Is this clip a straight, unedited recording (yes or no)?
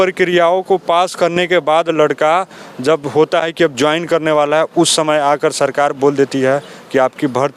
yes